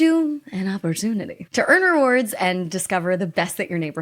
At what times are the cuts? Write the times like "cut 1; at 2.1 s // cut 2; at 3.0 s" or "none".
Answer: cut 1; at 1.4 s